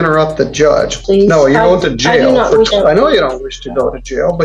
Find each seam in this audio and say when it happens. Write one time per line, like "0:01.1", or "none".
0:01.0
0:02.7